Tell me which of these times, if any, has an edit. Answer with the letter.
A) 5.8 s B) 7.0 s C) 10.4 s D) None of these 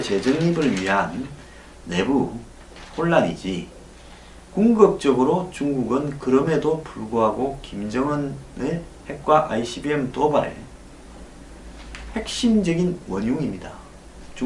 C